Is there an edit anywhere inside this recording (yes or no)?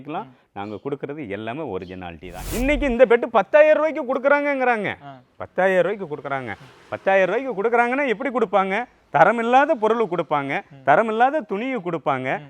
yes